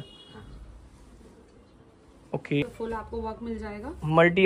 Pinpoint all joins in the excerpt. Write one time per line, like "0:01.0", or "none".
0:02.6

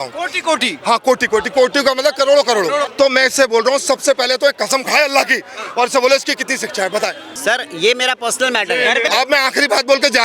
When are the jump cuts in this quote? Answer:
0:02.9
0:07.3
0:09.1

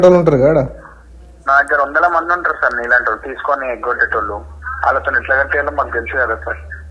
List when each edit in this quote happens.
none

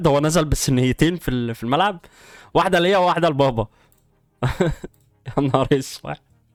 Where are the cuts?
none

